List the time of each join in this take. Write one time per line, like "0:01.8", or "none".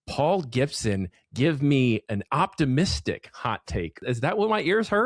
0:02.0
0:04.0